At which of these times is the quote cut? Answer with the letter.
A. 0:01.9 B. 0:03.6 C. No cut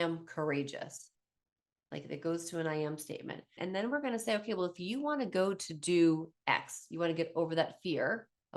B